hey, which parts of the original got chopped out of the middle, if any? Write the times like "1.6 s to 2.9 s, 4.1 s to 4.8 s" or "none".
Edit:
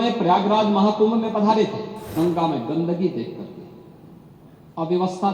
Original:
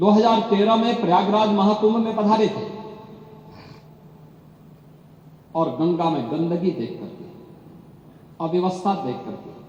2.9 s to 5.7 s